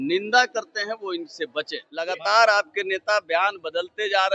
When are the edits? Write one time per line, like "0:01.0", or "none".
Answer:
0:01.9